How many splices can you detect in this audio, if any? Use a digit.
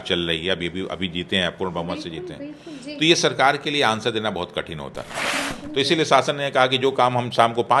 1